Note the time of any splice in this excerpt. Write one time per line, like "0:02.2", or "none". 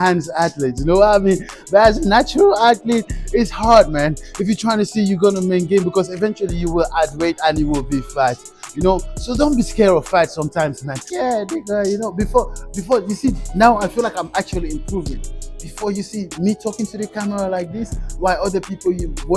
0:11.1